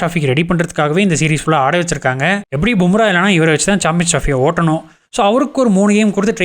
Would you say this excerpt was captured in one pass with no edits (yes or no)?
no